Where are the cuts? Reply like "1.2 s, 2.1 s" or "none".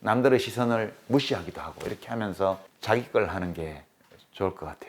2.7 s